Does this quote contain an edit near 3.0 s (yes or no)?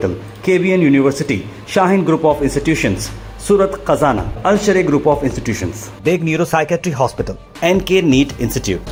no